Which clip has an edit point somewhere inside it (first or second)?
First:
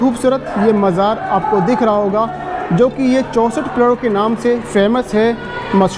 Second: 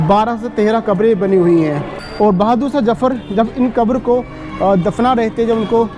second